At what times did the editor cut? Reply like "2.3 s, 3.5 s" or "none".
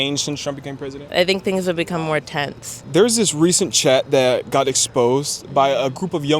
1.0 s, 2.7 s